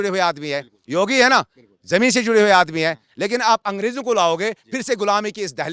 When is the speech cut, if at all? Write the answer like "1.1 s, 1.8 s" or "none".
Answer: none